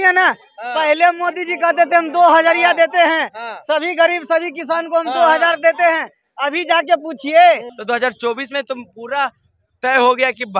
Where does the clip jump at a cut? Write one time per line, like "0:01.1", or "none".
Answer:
0:07.7